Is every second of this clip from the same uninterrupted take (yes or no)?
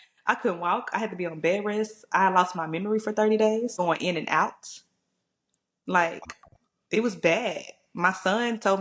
no